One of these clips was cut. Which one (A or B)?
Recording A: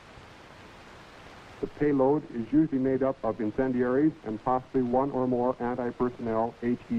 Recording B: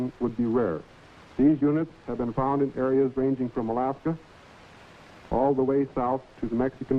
B